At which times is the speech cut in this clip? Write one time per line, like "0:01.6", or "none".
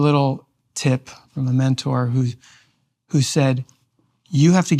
0:01.3